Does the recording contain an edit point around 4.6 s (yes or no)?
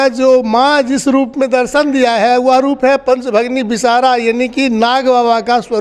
no